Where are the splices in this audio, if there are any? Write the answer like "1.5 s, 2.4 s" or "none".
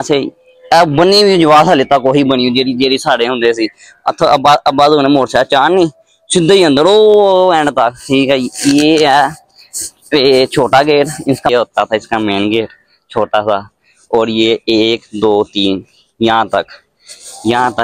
8.2 s, 11.5 s